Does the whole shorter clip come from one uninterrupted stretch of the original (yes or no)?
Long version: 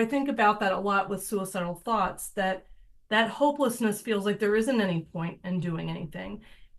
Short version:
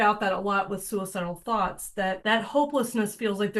no